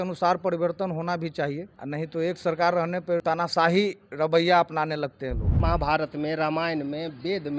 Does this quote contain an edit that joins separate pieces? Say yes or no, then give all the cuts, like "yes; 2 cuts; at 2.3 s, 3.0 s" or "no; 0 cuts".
yes; 3 cuts; at 1.7 s, 3.2 s, 5.5 s